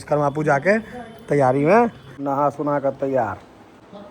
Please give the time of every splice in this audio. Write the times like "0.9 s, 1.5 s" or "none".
2.1 s